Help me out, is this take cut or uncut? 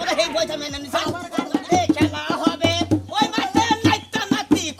cut